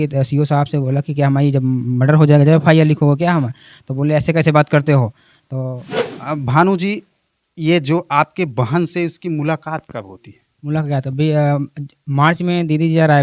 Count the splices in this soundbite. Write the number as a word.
one